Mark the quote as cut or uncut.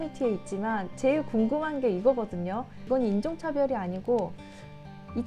uncut